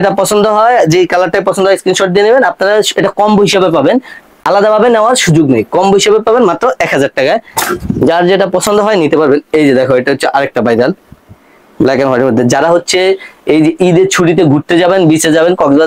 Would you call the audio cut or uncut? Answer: uncut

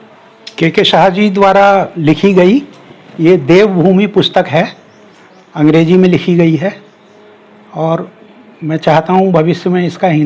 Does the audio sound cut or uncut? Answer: uncut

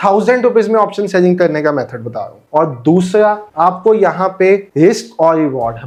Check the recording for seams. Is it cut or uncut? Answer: uncut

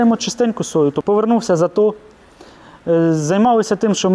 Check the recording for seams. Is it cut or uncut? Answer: cut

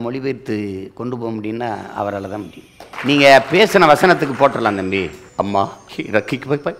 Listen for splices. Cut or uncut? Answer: cut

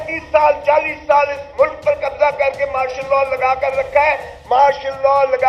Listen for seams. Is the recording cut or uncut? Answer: uncut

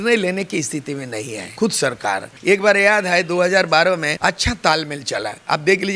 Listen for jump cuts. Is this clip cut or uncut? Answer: cut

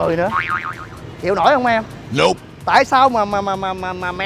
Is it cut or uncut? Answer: uncut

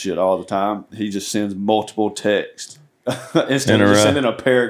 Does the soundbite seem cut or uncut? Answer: uncut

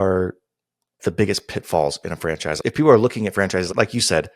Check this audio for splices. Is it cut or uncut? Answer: cut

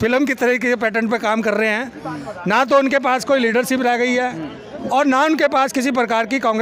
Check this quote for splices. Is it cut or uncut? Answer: uncut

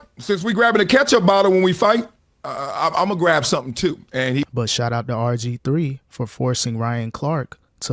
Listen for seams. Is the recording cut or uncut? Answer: cut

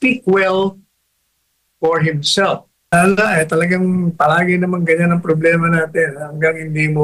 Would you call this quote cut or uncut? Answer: cut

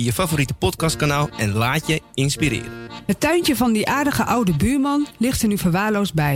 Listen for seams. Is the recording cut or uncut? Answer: cut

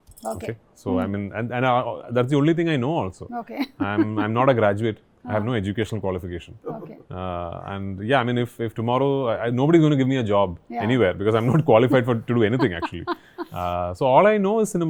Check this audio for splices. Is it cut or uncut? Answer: uncut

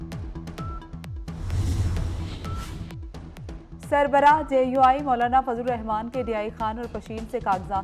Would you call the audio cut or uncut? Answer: cut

